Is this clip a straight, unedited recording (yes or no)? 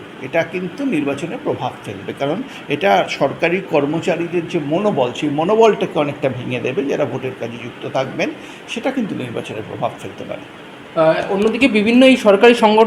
yes